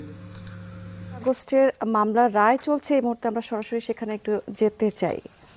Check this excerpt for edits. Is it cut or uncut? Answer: cut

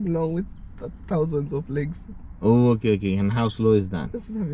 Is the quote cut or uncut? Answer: uncut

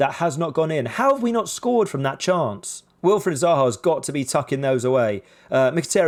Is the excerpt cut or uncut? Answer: uncut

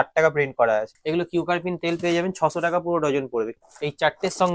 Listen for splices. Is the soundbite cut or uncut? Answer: cut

